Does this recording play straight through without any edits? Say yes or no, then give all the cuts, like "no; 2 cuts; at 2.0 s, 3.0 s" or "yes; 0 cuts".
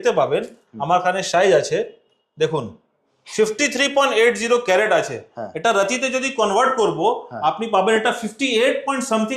yes; 0 cuts